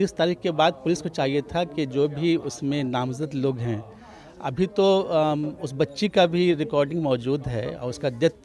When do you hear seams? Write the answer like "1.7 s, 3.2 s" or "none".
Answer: none